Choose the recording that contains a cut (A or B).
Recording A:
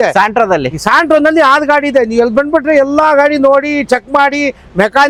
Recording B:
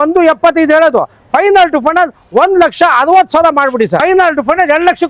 B